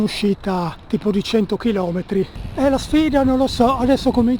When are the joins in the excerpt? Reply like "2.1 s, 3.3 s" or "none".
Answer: 2.4 s